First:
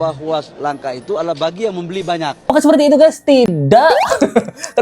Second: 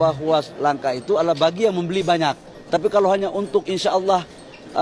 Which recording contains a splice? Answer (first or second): first